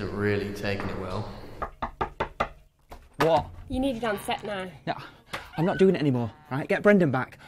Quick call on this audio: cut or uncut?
uncut